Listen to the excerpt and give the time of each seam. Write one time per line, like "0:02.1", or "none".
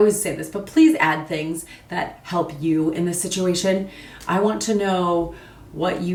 none